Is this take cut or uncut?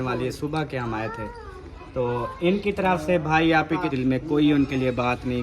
cut